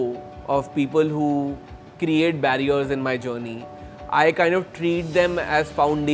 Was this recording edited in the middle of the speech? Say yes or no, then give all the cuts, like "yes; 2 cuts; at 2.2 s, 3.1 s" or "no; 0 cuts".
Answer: no; 0 cuts